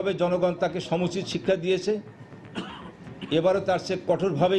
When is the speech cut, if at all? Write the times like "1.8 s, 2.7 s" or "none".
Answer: none